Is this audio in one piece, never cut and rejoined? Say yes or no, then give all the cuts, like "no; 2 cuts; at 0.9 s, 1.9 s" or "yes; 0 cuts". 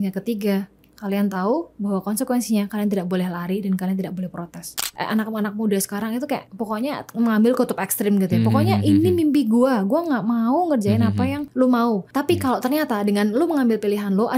no; 4 cuts; at 4.7 s, 6.5 s, 11.4 s, 12.1 s